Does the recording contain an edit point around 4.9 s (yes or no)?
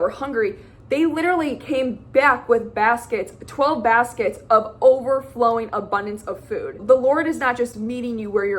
no